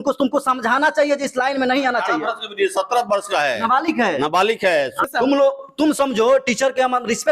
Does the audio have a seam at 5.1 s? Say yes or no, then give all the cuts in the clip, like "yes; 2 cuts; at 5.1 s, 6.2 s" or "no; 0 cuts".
yes; 1 cut; at 5.1 s